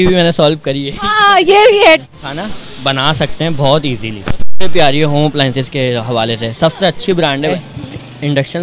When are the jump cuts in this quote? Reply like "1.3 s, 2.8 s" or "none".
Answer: 2.0 s, 7.5 s